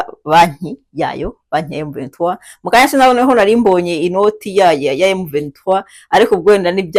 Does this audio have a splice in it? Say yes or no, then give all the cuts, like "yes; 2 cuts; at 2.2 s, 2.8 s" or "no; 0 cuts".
no; 0 cuts